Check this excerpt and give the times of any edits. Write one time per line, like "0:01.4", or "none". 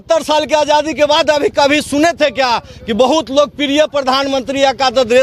none